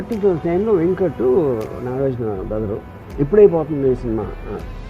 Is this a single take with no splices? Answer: no; 1 cut; at 3.0 s

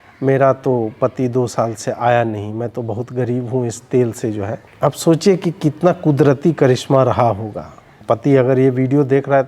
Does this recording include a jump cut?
yes; 2 cuts; at 4.6 s, 7.9 s

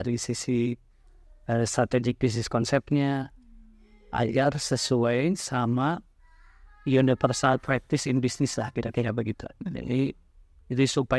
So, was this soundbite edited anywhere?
no; 0 cuts

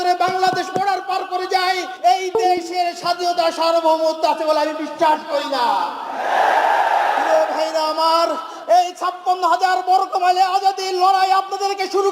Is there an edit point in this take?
yes; 1 cut; at 1.9 s

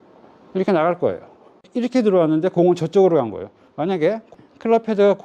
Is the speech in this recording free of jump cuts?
yes; 0 cuts

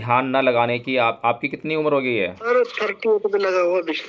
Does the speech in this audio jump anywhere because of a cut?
yes; 1 cut; at 2.5 s

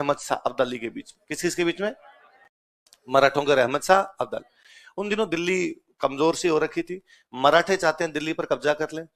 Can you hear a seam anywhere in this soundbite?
no; 0 cuts

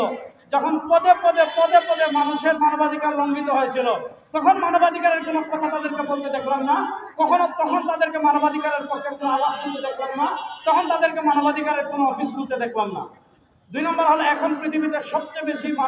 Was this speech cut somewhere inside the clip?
no; 0 cuts

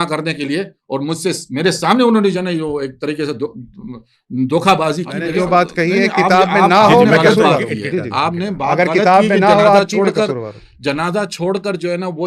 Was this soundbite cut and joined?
yes; 1 cut; at 5.1 s

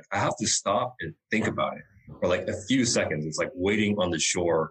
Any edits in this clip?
no; 0 cuts

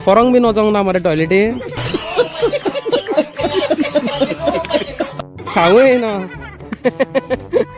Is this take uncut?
yes; 0 cuts

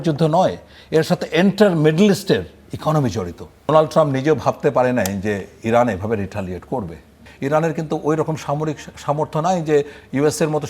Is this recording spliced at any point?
yes; 2 cuts; at 3.7 s, 7.3 s

